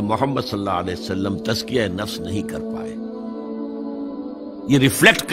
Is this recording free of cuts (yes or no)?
yes